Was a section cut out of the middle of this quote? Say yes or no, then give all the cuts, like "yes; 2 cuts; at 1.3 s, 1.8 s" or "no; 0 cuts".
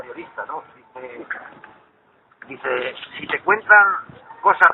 yes; 1 cut; at 1.1 s